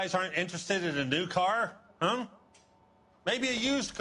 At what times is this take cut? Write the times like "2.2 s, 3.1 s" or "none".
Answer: none

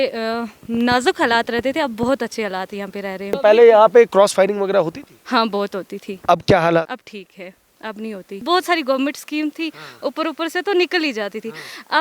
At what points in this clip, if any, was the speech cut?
3.4 s, 6.9 s, 8.4 s

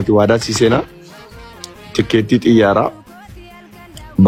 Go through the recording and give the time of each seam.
none

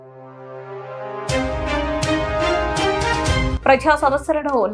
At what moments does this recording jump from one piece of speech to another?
3.5 s

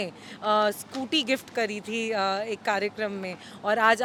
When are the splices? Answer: none

